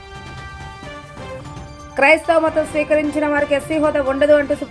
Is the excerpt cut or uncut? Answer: cut